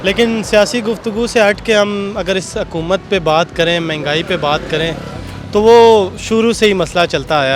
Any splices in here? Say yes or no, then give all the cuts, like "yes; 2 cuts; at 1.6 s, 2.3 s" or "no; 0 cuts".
no; 0 cuts